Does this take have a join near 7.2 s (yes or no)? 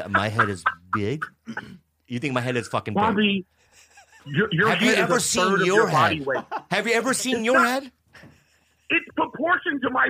no